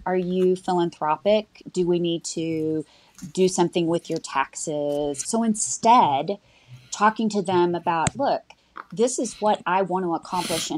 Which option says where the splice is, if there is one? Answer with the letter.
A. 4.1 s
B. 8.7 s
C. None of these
C